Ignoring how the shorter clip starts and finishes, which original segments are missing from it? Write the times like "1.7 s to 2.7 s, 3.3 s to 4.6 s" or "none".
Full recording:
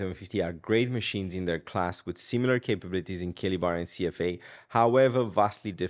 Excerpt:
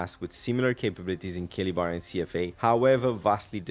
4.4 s to 4.7 s